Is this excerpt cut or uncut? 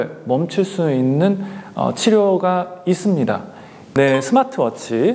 cut